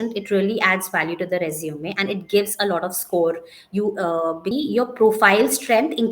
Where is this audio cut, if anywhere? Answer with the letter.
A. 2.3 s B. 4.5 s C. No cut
B